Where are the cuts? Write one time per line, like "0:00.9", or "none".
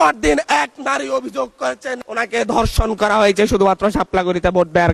none